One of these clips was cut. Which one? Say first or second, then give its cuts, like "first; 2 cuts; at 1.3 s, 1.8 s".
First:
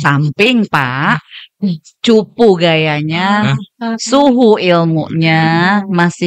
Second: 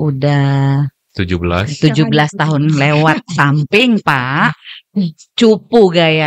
second; 1 cut; at 1.0 s